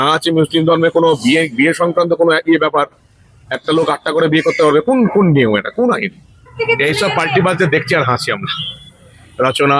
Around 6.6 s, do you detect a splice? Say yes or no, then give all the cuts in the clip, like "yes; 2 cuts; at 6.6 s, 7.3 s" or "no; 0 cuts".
yes; 1 cut; at 6.6 s